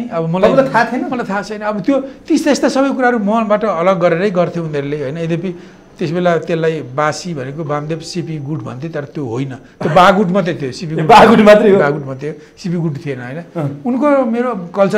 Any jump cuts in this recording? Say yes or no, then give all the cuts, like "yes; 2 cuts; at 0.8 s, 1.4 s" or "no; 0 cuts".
no; 0 cuts